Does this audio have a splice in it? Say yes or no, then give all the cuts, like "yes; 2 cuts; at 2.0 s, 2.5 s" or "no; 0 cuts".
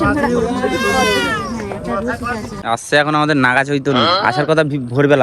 yes; 1 cut; at 2.5 s